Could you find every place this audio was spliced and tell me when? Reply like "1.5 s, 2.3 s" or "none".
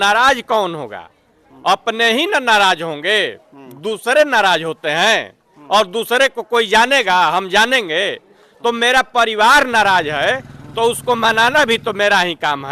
none